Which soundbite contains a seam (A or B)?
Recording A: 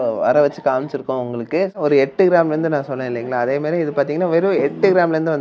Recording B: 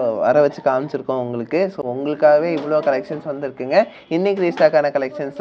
A